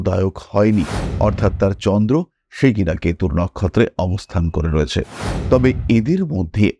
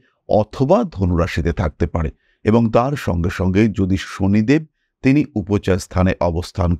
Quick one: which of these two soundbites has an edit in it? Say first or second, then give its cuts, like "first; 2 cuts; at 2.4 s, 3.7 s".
first; 1 cut; at 5.3 s